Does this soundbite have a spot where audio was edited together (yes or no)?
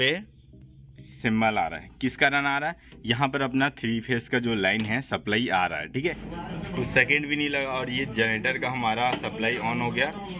yes